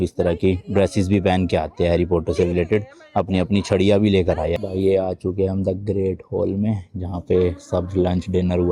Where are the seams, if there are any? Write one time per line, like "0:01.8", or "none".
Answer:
0:04.6